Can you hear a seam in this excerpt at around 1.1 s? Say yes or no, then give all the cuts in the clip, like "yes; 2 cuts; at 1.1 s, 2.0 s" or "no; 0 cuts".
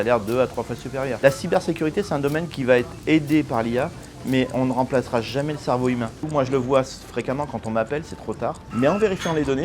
yes; 3 cuts; at 1.1 s, 6.2 s, 8.6 s